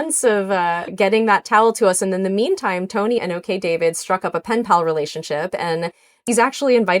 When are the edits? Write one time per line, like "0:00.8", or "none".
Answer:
0:06.0